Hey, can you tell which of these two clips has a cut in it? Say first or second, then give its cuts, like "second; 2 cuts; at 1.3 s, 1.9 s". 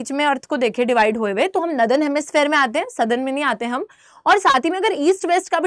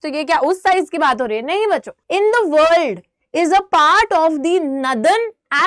second; 1 cut; at 2.0 s